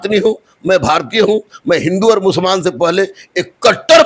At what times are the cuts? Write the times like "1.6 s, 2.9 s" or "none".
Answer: none